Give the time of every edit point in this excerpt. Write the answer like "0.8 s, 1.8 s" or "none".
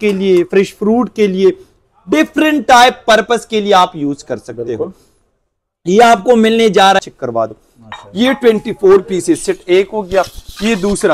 7.0 s